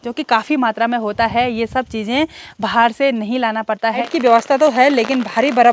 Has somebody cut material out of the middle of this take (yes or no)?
yes